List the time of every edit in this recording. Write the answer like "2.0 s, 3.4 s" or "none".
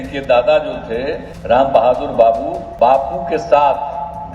1.3 s, 2.6 s